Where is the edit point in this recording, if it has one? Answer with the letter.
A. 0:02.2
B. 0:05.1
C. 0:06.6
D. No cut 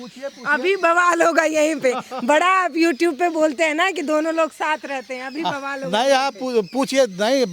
D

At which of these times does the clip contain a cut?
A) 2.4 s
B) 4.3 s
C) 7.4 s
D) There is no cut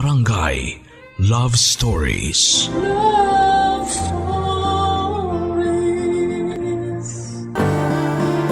C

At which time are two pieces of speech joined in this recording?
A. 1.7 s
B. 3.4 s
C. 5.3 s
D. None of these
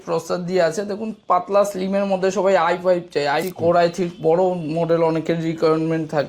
B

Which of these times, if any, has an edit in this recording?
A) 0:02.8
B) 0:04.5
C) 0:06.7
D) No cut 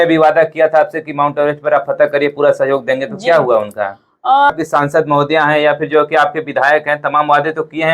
B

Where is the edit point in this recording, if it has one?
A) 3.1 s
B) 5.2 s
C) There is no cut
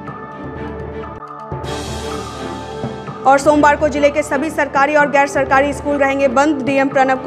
A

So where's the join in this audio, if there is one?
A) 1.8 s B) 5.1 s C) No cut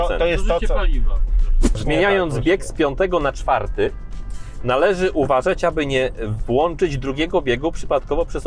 A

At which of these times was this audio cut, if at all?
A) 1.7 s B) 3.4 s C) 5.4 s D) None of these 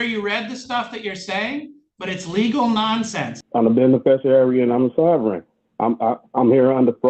B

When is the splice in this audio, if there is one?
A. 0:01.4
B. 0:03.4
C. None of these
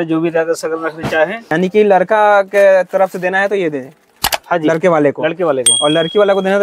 A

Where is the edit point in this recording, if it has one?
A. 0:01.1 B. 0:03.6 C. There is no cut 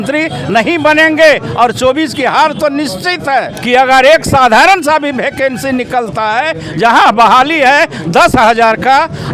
B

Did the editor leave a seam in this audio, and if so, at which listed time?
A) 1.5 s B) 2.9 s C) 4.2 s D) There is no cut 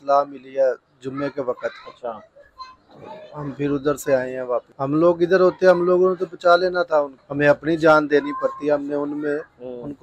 D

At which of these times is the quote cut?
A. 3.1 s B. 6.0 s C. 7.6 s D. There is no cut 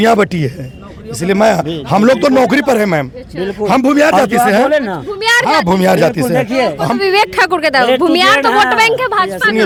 D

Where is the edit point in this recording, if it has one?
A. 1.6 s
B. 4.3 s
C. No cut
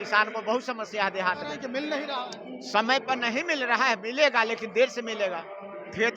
A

